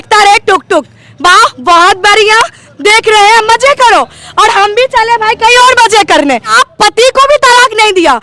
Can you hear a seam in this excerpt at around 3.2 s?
no; 1 cut; at 6.5 s

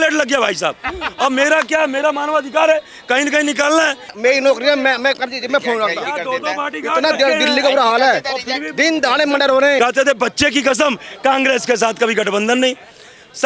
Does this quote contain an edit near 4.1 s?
yes; 2 cuts; at 4.1 s, 9.8 s

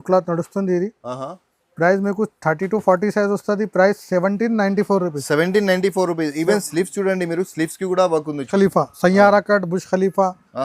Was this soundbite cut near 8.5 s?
yes; 1 cut; at 8.5 s

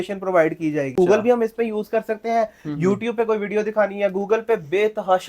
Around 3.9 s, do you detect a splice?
no; 1 cut; at 0.9 s

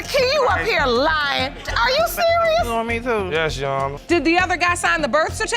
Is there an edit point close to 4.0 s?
yes; 1 cut; at 4.0 s

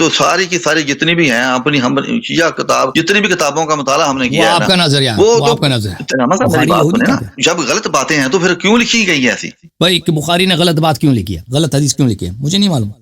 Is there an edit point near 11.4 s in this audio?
yes; 5 cuts; at 2.9 s, 6.1 s, 7.3 s, 9.7 s, 11.4 s

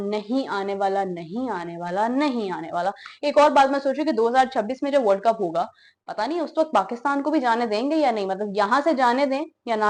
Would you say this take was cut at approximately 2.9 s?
no; 0 cuts

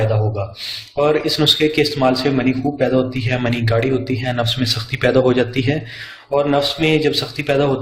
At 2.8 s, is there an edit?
yes; 1 cut; at 2.8 s

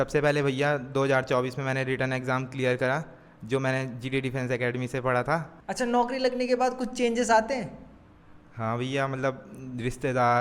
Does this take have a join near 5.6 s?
yes; 1 cut; at 5.6 s

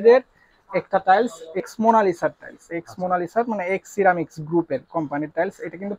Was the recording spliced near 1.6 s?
yes; 1 cut; at 1.6 s

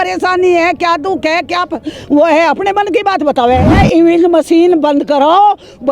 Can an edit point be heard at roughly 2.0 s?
no; 1 cut; at 3.7 s

